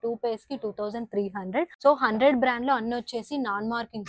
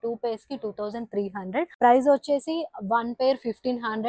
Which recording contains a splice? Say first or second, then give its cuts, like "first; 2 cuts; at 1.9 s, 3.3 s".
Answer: second; 1 cut; at 1.7 s